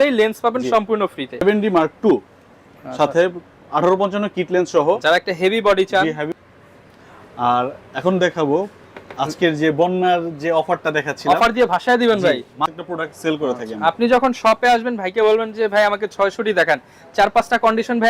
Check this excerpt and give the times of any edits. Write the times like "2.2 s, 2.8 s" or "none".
1.4 s, 6.3 s, 12.7 s